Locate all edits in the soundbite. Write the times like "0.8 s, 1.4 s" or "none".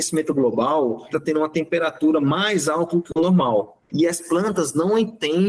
1.1 s, 3.7 s